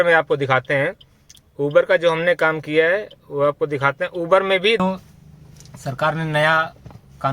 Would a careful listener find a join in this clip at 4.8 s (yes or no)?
yes